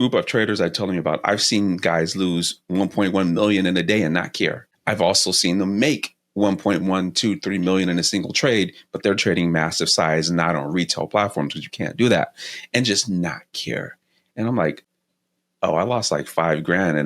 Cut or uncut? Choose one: cut